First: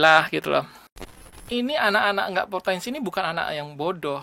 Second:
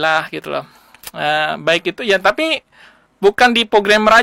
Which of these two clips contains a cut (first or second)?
first